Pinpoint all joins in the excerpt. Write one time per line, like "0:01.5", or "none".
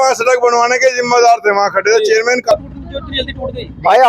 0:02.5